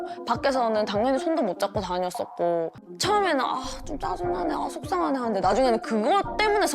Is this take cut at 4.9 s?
no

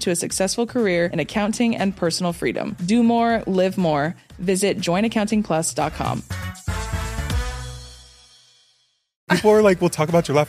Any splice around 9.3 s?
yes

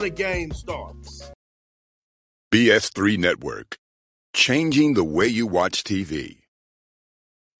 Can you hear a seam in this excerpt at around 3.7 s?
no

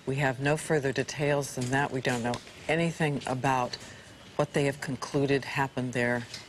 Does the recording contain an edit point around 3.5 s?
yes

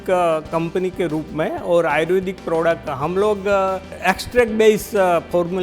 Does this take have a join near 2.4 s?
no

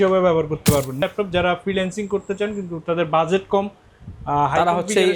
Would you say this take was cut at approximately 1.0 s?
yes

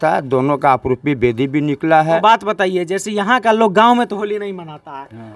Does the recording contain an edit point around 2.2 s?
yes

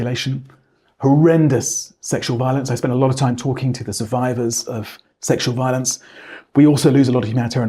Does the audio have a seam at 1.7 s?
no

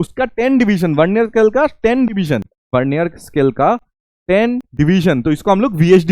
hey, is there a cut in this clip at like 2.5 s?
yes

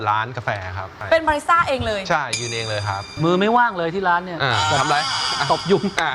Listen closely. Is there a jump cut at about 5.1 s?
no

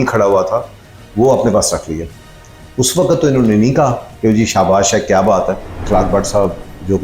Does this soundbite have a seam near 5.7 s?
yes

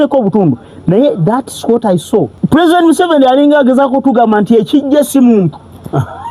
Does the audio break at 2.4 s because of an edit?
yes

